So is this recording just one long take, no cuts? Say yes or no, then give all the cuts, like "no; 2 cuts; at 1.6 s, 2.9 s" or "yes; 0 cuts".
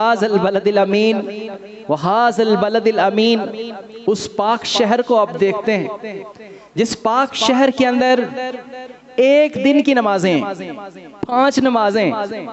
yes; 0 cuts